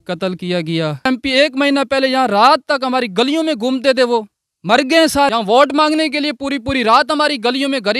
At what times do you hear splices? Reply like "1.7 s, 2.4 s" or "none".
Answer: 1.1 s, 5.3 s